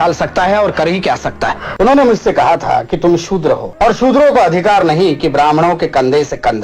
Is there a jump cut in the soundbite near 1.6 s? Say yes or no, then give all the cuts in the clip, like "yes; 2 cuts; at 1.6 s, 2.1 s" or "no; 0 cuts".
yes; 2 cuts; at 1.6 s, 3.7 s